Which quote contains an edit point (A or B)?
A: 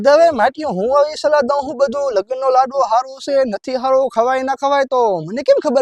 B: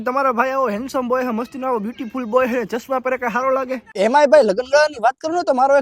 B